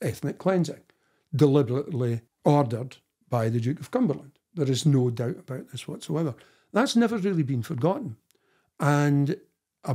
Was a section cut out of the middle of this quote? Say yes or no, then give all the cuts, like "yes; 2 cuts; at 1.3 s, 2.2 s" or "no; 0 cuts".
no; 0 cuts